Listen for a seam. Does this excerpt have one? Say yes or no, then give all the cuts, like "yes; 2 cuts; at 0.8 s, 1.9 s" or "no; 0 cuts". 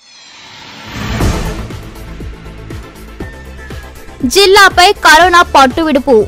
no; 0 cuts